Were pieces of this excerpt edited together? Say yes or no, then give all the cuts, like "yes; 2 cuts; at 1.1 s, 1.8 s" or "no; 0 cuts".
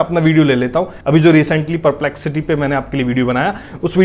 yes; 1 cut; at 1.0 s